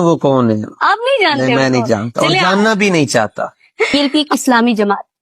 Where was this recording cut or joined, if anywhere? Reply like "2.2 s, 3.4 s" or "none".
3.9 s